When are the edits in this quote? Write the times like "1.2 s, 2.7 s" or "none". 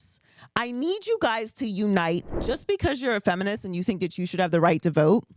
2.4 s